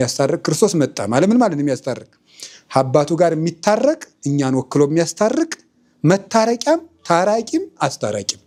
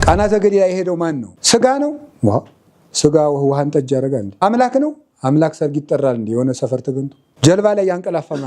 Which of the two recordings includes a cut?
second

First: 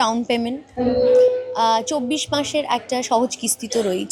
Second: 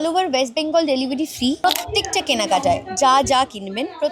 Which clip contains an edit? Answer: second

